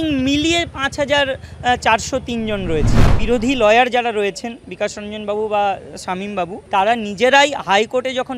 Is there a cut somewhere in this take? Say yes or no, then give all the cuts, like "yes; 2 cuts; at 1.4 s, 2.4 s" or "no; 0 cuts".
yes; 2 cuts; at 3.1 s, 6.6 s